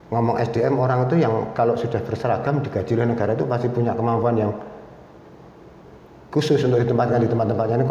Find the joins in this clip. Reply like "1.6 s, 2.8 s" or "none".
none